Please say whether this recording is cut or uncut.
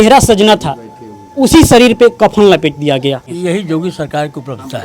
cut